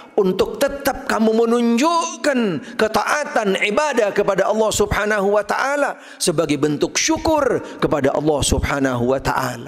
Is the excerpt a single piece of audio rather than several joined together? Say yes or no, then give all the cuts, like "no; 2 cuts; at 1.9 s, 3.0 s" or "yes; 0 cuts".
yes; 0 cuts